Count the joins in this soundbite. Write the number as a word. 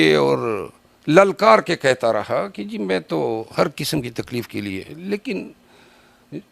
zero